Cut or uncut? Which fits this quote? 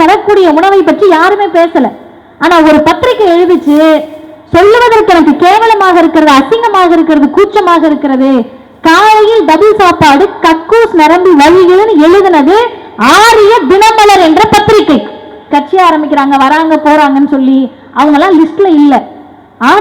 cut